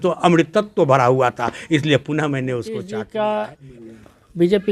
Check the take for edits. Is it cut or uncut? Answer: cut